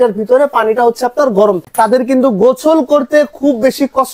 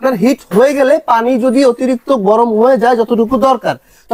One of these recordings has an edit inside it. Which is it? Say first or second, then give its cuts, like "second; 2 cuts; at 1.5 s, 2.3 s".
first; 1 cut; at 1.7 s